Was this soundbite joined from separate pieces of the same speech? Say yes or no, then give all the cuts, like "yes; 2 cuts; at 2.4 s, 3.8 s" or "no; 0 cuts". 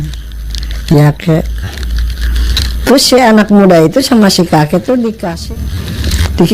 yes; 1 cut; at 5.3 s